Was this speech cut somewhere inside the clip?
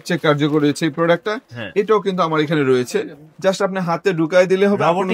no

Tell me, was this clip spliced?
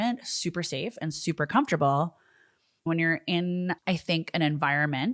yes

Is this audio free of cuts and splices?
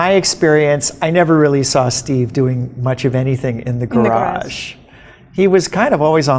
yes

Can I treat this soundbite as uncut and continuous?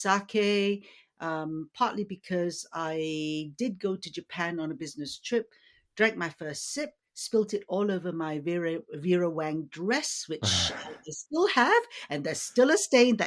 yes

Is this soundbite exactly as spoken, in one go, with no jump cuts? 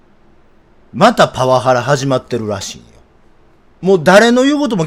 yes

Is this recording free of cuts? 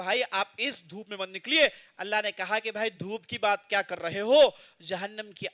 yes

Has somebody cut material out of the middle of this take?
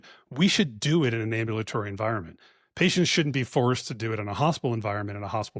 no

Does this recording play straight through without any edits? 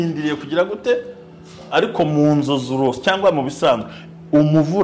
yes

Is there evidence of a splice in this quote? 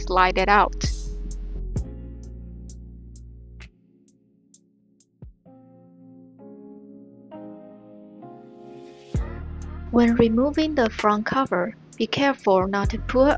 no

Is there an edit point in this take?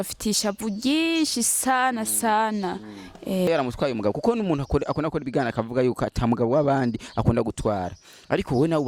yes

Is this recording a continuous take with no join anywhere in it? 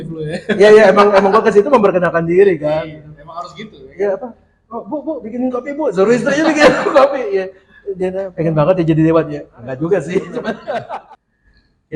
no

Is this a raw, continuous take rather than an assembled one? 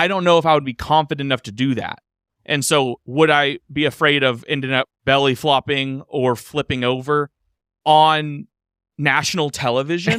yes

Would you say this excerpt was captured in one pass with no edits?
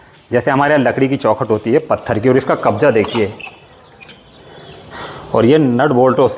yes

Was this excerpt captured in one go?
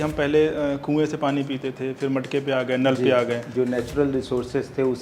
no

